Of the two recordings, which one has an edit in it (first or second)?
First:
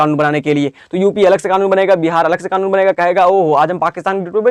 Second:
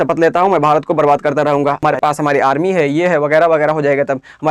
second